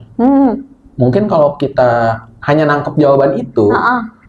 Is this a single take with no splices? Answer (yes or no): no